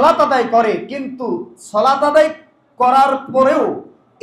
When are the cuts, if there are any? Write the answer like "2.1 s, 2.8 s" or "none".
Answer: none